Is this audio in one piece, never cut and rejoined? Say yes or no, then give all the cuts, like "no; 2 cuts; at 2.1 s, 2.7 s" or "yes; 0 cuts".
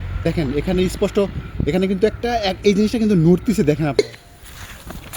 no; 1 cut; at 4.0 s